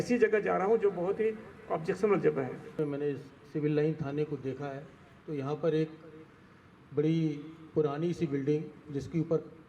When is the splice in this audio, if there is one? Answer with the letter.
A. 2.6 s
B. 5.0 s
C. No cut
A